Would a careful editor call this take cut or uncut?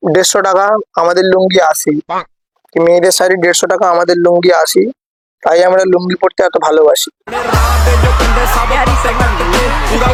uncut